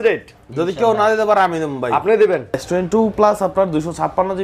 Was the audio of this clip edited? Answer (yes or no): yes